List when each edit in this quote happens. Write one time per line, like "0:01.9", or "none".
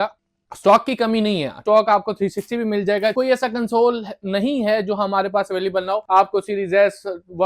0:01.6
0:03.1
0:06.0